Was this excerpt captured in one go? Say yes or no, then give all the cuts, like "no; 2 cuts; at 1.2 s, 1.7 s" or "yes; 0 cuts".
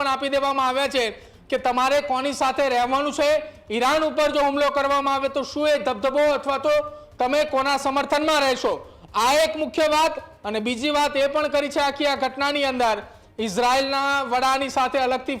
yes; 0 cuts